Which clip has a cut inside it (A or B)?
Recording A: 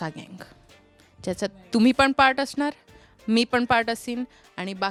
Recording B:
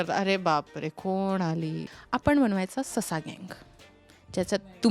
B